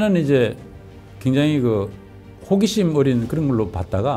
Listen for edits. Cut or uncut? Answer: uncut